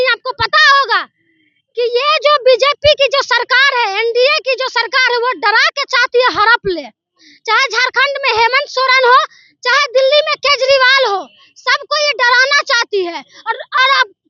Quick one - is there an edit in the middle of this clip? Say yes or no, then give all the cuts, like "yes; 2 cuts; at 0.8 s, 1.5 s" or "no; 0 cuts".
no; 0 cuts